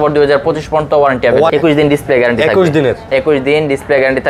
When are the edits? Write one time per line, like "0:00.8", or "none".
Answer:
0:01.5